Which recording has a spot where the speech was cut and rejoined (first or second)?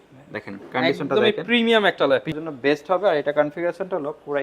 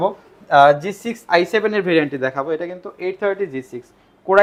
first